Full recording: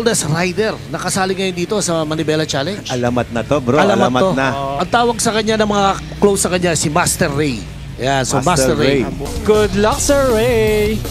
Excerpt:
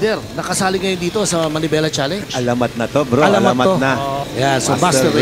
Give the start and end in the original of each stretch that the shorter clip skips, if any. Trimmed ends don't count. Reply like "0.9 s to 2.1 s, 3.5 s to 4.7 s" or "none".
4.7 s to 7.8 s